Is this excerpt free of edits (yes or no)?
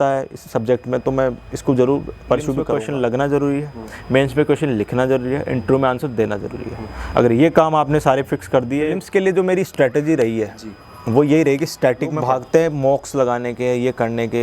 no